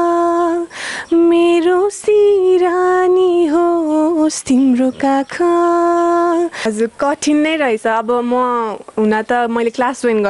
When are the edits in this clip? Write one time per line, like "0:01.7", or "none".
0:06.6